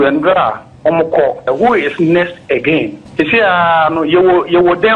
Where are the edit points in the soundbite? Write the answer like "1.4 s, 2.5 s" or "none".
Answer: 1.5 s